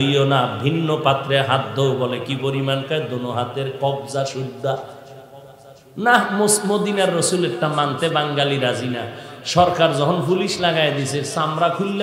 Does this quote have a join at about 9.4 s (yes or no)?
no